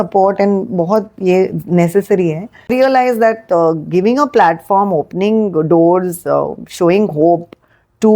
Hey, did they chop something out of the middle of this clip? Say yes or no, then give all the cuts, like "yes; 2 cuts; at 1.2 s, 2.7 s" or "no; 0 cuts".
yes; 1 cut; at 2.7 s